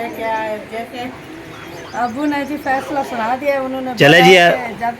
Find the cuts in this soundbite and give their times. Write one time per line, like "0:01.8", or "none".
0:00.9